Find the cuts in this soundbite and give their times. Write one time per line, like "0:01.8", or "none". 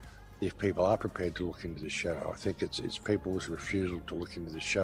none